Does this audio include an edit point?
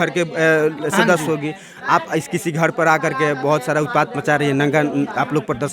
no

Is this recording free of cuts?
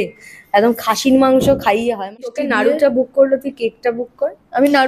no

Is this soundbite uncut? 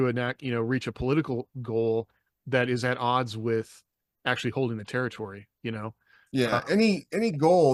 yes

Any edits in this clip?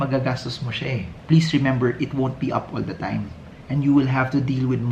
yes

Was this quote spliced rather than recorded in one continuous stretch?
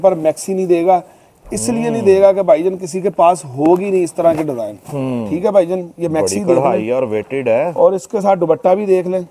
no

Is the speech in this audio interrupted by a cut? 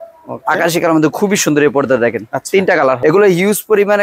yes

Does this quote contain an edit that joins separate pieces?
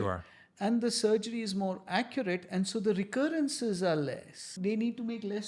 yes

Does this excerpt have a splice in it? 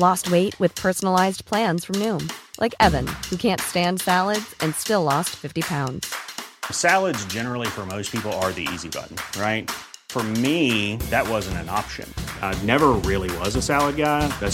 no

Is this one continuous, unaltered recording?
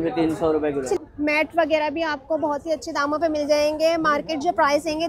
no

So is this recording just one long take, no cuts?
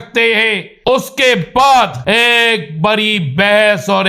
no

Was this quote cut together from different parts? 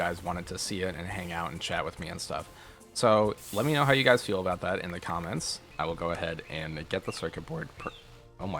yes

